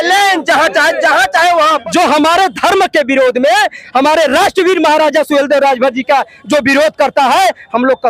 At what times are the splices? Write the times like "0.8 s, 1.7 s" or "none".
1.8 s

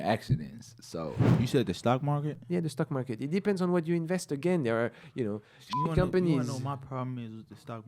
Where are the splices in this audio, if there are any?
1.3 s

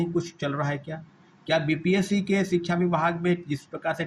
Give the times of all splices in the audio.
none

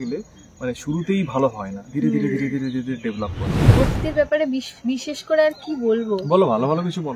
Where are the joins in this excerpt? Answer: 3.7 s

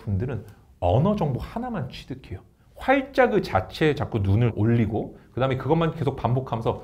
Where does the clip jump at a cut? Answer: none

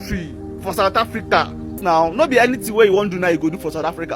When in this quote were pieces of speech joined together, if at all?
1.8 s

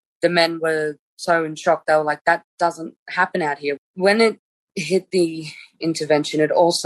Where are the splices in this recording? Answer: 3.9 s

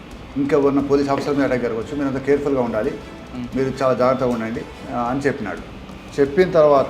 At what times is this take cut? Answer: 4.7 s

